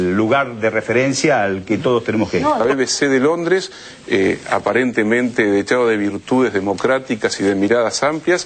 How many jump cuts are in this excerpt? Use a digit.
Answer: 1